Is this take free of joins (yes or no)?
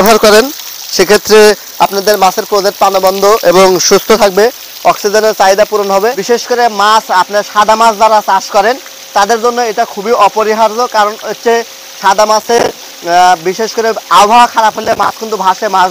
no